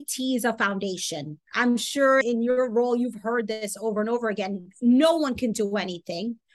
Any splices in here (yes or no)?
no